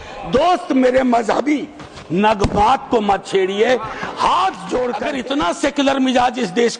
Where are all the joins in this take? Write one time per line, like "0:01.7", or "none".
0:05.1